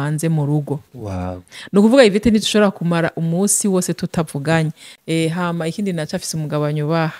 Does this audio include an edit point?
yes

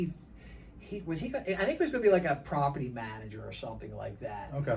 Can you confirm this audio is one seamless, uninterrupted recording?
yes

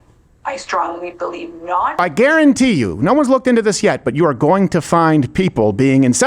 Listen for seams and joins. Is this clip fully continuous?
no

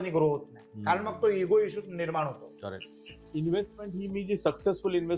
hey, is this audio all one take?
no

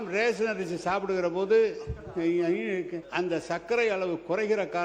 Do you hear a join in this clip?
yes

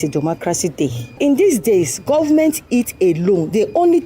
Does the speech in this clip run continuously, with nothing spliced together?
no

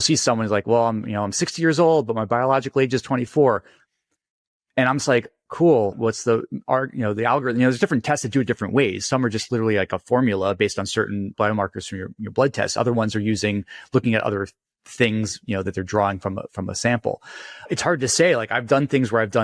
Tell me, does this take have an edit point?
yes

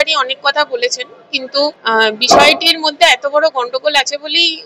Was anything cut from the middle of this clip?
yes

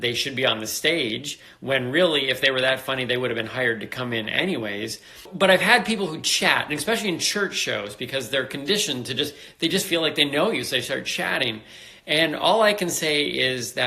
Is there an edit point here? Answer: yes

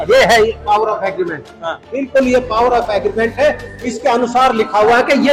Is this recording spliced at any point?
no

